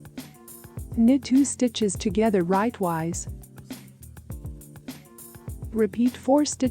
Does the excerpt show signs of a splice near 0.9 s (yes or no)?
yes